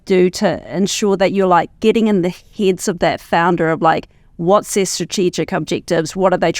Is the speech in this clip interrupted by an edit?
no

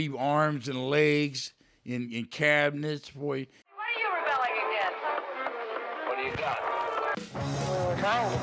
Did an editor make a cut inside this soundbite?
yes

